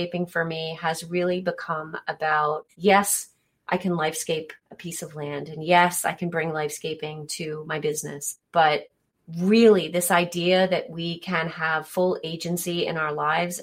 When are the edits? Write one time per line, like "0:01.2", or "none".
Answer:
0:02.7